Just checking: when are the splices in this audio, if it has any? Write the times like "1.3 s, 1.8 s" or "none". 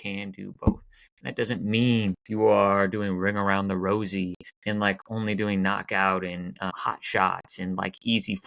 2.2 s, 4.5 s, 6.7 s